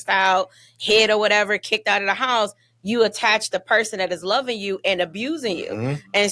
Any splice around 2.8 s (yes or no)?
no